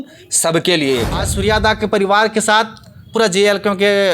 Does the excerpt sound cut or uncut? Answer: cut